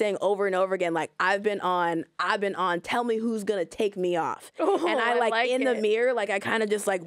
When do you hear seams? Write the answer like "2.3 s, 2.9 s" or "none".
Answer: none